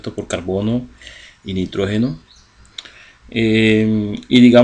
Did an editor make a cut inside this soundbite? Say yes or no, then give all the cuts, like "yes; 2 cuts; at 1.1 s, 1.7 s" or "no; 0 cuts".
yes; 1 cut; at 2.0 s